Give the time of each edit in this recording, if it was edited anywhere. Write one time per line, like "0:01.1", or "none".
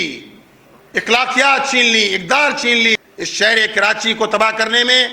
0:02.9